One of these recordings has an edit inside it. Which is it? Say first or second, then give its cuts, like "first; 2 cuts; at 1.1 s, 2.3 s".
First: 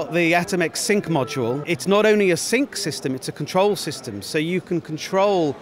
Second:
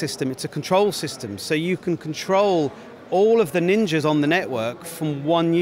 first; 1 cut; at 1.6 s